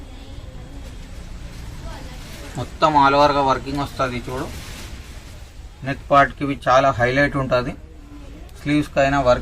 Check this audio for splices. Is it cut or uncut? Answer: uncut